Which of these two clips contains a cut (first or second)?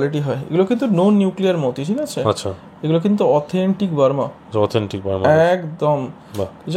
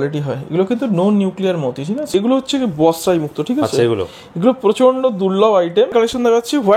second